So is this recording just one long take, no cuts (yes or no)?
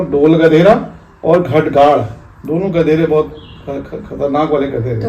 yes